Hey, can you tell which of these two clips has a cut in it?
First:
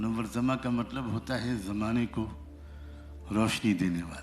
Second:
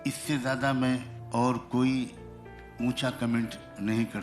second; 1 cut; at 1.2 s

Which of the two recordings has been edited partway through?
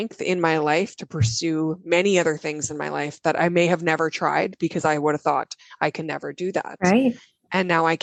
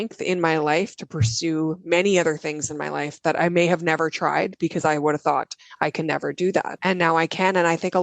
second; 1 cut; at 6.7 s

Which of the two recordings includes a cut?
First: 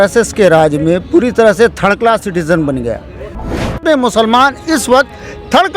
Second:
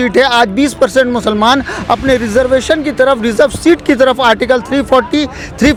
first; 1 cut; at 3.7 s

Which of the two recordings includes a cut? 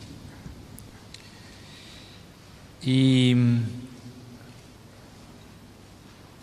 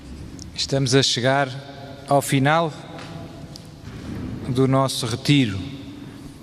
first; 1 cut; at 3.6 s

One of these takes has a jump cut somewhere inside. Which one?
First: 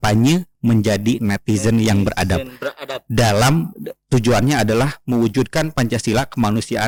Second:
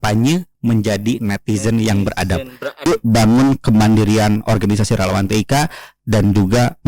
second; 1 cut; at 2.8 s

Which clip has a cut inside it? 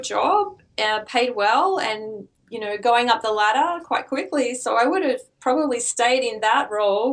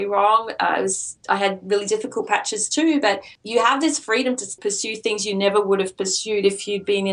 second; 2 cuts; at 3.3 s, 4.5 s

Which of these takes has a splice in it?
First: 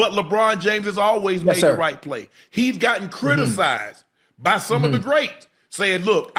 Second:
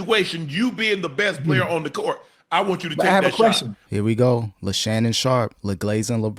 second; 2 cuts; at 3.8 s, 4.6 s

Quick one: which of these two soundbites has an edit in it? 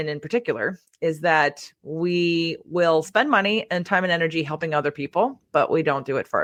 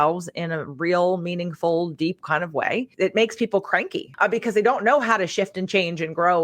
second; 2 cuts; at 2.9 s, 4.0 s

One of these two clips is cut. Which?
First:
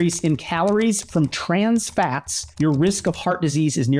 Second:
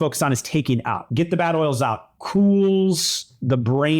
second; 1 cut; at 1.1 s

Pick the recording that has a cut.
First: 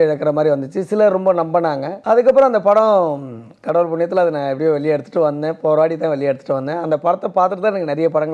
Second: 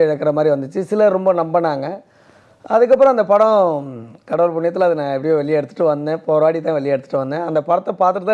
first; 1 cut; at 1.9 s

